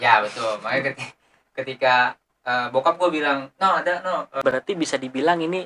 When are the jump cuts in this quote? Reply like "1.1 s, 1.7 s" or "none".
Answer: 4.5 s